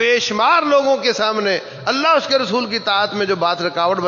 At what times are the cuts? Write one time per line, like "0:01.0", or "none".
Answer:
none